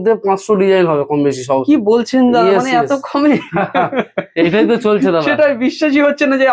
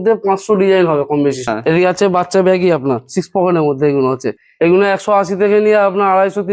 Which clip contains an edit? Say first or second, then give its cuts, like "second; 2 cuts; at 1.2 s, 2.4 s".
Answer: second; 2 cuts; at 1.5 s, 4.4 s